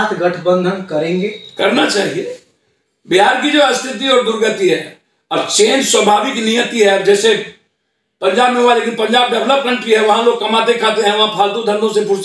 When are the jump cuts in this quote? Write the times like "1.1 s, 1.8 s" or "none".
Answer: none